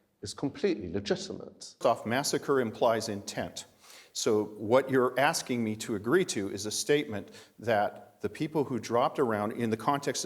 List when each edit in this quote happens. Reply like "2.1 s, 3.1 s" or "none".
1.8 s